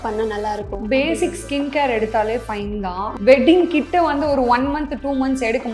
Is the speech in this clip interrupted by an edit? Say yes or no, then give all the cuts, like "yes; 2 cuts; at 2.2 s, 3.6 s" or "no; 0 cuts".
yes; 1 cut; at 3.1 s